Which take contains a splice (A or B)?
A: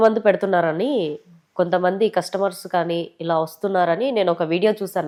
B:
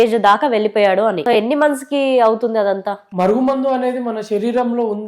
B